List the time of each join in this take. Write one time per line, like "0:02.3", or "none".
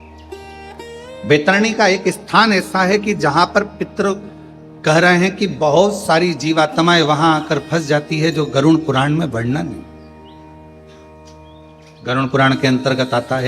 0:01.2